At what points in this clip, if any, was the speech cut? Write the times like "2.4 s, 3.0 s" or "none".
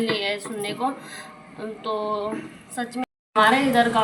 3.0 s